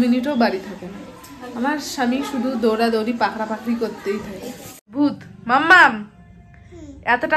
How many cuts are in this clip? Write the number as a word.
one